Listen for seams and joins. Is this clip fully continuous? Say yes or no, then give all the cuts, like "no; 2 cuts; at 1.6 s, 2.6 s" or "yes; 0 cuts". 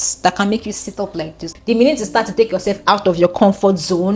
no; 1 cut; at 1.5 s